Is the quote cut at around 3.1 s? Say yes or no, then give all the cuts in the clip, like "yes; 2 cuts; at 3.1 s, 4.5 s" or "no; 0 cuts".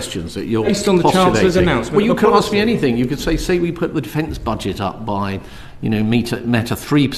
no; 0 cuts